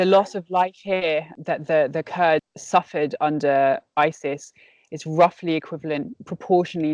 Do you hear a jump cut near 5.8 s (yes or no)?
no